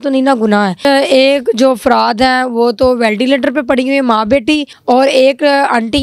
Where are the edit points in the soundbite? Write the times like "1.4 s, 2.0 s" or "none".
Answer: 0.9 s, 4.7 s